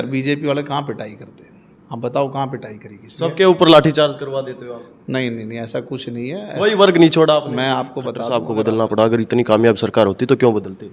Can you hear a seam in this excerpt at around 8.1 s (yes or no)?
yes